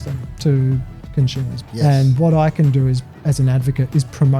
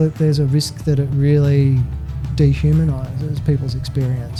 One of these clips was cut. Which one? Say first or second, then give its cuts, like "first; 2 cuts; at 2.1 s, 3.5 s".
first; 1 cut; at 1.5 s